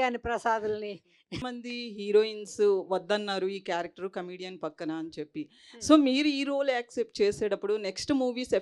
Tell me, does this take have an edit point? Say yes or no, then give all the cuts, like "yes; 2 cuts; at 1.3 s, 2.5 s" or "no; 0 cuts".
yes; 1 cut; at 1.4 s